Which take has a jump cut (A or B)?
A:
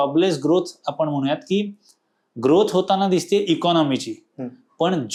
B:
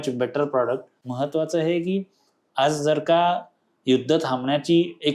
B